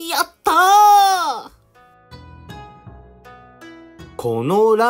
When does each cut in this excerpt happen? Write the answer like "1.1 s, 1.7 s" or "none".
1.6 s, 3.9 s